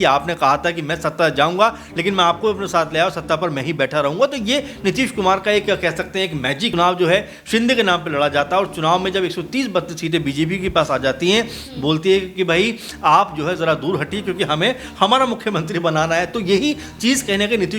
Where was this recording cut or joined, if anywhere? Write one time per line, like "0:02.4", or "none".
0:06.7

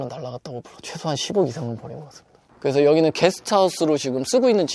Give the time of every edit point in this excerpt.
0:02.5

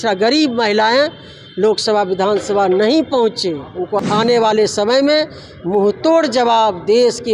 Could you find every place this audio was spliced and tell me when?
0:04.0

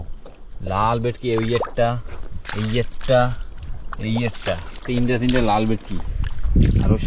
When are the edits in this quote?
none

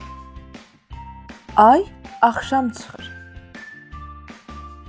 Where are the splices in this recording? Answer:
0:01.5
0:02.8

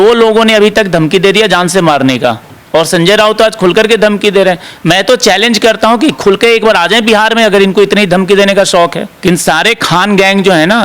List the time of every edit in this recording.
0:02.5
0:09.1

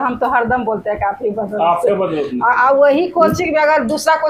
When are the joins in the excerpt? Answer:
none

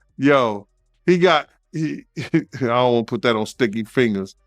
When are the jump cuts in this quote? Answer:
0:01.6

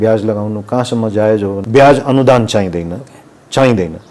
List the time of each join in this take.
0:01.6

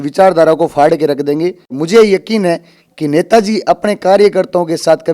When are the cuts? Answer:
0:01.7

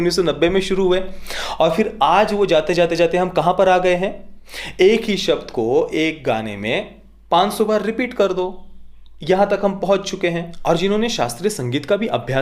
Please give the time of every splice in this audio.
0:10.5

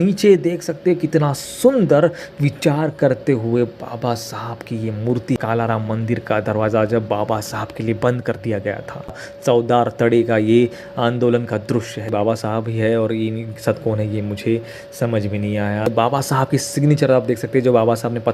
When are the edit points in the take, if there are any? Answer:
0:05.4
0:09.3
0:12.1
0:15.9

